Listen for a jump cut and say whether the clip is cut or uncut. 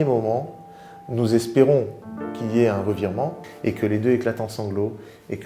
cut